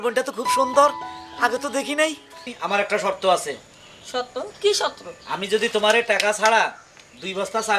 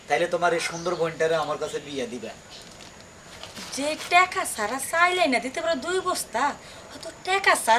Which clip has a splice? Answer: first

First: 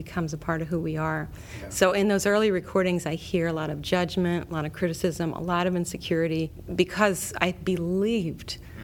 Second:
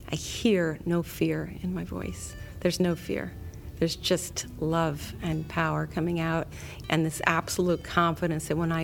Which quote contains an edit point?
first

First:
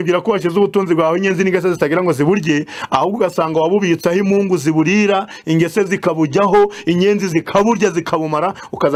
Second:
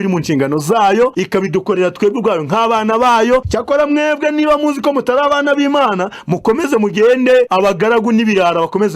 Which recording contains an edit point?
second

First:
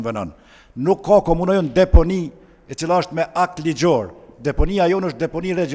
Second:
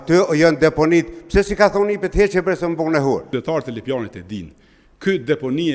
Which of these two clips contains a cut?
second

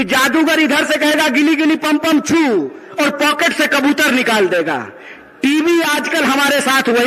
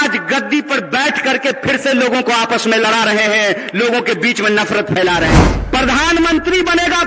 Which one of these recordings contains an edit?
second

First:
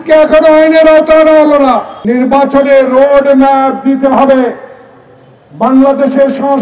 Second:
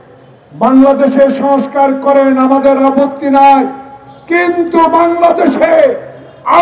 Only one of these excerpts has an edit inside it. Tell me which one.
first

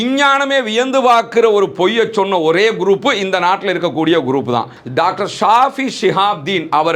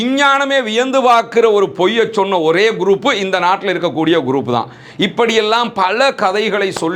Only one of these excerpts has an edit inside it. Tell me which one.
first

